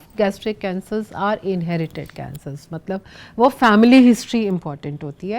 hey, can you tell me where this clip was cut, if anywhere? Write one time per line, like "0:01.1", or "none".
none